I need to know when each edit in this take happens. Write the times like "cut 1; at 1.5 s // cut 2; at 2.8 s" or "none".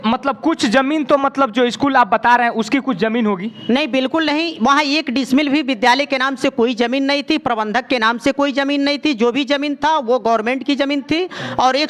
none